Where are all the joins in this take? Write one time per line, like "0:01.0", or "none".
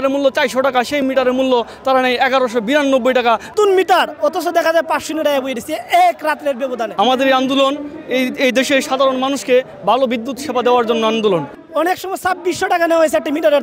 0:03.5
0:06.9
0:11.6